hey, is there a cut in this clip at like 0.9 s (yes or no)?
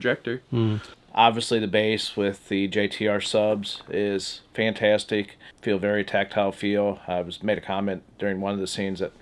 yes